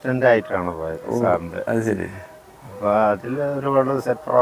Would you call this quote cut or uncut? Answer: uncut